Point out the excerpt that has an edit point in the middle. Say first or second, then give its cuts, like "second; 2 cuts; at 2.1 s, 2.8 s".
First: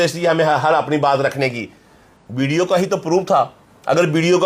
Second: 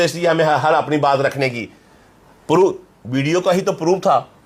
first; 1 cut; at 2.2 s